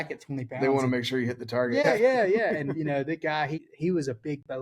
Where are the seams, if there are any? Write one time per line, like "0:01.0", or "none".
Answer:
0:01.8
0:03.7